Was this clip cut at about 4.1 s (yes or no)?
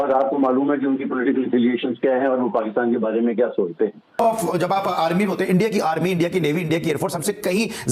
yes